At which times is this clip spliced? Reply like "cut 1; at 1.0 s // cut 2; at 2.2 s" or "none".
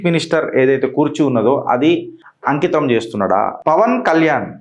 cut 1; at 3.5 s